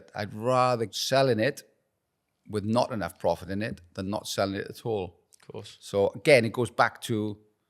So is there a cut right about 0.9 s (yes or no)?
yes